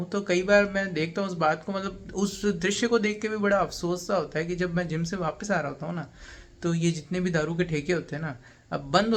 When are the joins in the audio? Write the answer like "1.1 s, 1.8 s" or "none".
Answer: none